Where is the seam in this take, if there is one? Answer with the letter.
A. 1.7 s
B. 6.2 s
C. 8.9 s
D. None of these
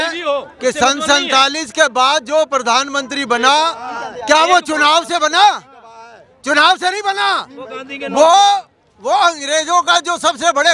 D